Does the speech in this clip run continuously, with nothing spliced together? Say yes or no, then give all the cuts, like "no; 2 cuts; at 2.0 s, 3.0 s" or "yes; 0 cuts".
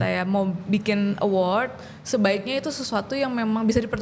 yes; 0 cuts